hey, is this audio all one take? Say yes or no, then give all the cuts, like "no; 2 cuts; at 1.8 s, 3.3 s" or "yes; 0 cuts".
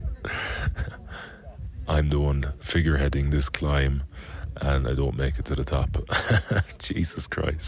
no; 1 cut; at 2.5 s